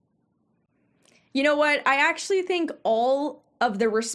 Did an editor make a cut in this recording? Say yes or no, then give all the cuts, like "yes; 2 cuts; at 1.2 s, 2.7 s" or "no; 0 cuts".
no; 0 cuts